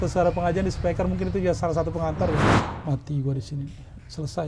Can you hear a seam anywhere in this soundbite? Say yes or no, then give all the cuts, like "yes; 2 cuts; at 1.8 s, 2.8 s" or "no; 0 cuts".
yes; 1 cut; at 2.5 s